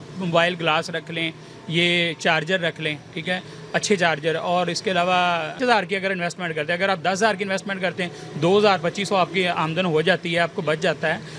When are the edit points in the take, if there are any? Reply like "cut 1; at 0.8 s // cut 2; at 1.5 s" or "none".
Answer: cut 1; at 5.6 s